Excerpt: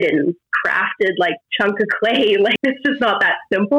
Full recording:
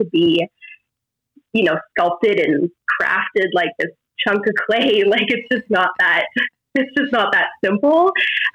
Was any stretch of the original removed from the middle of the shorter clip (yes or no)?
yes